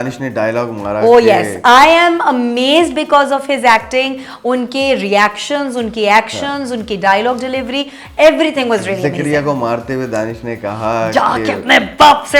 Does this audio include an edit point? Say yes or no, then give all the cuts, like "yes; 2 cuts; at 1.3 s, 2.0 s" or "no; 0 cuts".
no; 0 cuts